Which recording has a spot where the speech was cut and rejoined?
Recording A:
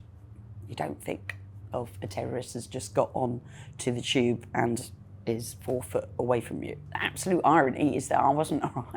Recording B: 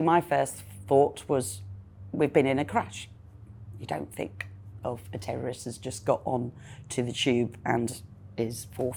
A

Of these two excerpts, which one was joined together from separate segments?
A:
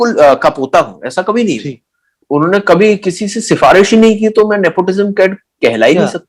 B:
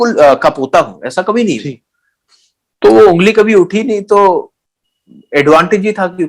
A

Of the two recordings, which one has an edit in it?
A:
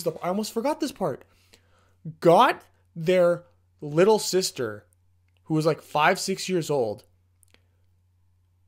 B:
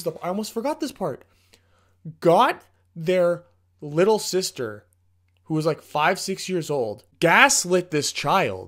B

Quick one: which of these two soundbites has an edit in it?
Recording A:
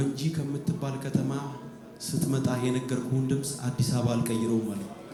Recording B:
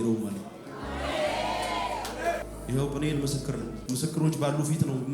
B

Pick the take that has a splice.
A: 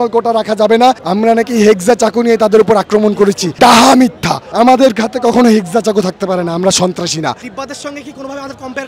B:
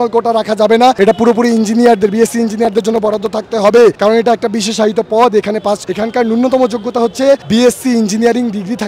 A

